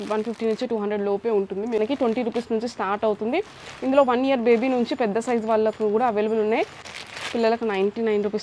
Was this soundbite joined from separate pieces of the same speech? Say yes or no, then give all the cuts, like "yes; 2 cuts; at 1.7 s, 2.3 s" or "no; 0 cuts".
yes; 2 cuts; at 1.8 s, 6.9 s